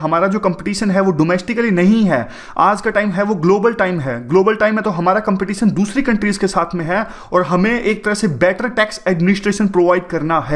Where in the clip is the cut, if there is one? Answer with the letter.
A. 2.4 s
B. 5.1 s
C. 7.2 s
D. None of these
A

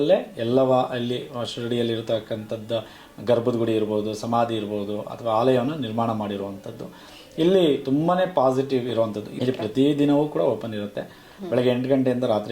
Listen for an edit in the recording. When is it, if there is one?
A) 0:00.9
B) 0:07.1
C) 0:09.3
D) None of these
C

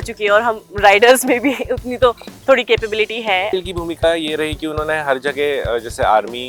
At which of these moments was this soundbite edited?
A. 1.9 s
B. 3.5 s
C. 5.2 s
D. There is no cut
B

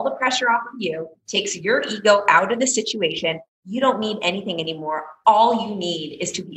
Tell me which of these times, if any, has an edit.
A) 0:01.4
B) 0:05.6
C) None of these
C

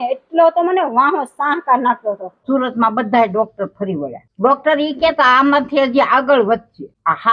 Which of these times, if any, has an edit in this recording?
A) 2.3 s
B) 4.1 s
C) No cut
A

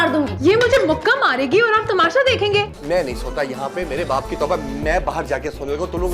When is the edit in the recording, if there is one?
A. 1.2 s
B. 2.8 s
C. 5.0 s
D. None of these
B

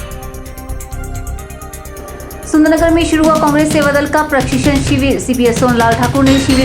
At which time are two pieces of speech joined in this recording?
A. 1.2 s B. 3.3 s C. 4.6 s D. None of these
D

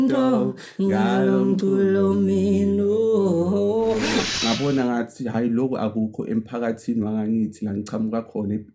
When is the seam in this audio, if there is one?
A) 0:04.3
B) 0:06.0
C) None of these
A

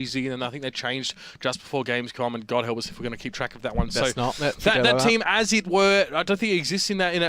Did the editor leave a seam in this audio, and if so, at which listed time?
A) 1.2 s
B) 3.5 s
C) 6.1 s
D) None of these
A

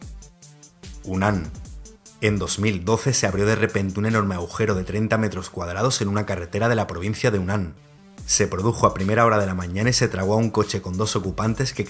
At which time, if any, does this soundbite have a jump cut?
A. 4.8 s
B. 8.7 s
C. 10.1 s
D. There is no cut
C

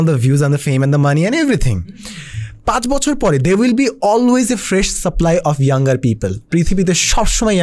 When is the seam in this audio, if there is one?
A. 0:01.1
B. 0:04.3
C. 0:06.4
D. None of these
D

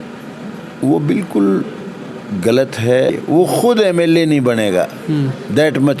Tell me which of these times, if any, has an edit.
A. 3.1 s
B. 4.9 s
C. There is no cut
A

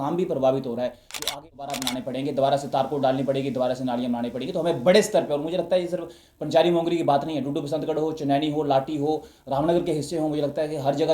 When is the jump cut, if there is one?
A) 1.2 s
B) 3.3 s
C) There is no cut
A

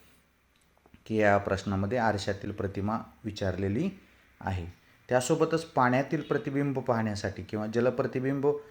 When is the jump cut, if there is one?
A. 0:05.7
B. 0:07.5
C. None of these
A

